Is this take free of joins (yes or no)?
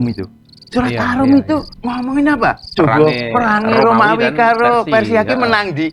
no